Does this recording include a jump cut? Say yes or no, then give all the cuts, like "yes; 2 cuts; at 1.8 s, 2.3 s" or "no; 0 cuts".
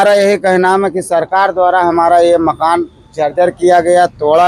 no; 0 cuts